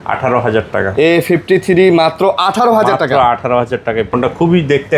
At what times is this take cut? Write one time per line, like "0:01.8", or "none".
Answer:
0:04.1